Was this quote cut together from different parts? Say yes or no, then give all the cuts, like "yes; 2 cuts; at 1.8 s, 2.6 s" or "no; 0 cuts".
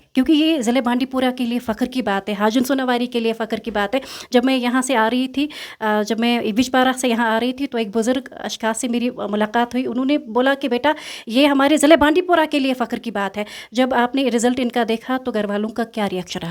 no; 0 cuts